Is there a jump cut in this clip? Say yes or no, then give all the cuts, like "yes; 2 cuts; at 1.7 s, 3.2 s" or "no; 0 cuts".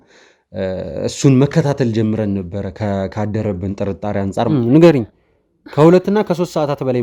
yes; 1 cut; at 4.5 s